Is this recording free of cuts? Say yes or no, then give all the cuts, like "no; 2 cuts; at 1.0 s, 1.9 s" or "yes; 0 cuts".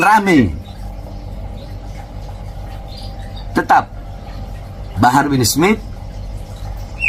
yes; 0 cuts